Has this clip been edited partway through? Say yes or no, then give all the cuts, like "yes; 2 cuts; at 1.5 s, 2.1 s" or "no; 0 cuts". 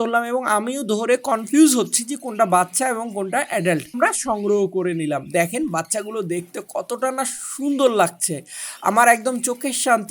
yes; 1 cut; at 4.0 s